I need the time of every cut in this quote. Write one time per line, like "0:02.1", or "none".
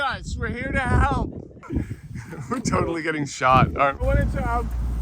0:01.6
0:04.0